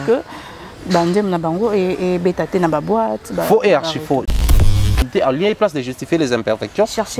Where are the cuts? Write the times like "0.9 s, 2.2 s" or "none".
4.6 s